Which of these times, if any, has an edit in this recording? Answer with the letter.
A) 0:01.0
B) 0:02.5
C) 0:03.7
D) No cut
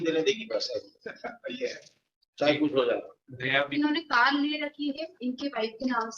C